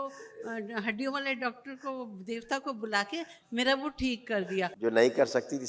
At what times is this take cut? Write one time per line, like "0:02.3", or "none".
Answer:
0:04.7